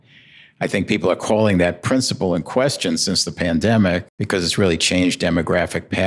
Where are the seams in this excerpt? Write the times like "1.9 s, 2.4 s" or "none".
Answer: 4.1 s